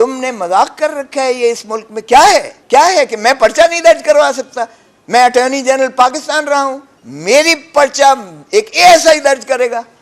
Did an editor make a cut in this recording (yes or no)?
yes